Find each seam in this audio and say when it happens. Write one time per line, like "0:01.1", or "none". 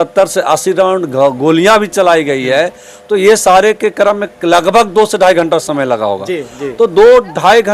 none